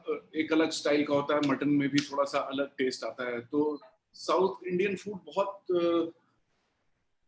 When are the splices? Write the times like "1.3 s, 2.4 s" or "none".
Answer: none

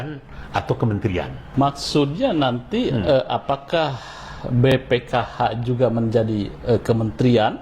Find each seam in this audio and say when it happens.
1.4 s

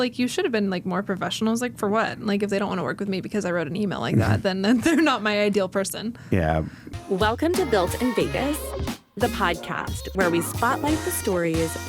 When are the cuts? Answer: 6.8 s

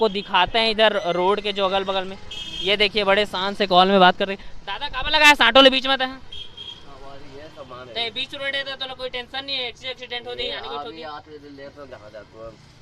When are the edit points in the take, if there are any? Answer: none

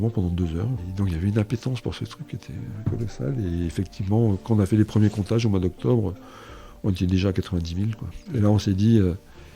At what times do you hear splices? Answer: none

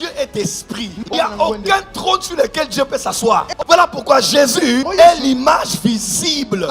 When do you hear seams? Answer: 1.0 s, 3.5 s

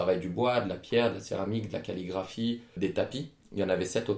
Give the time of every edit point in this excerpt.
3.0 s

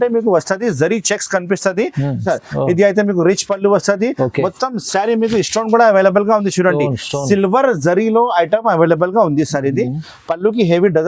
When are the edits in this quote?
2.2 s

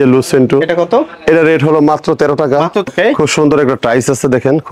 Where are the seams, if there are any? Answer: 2.9 s

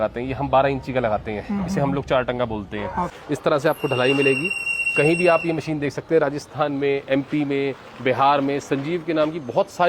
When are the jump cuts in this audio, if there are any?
3.2 s

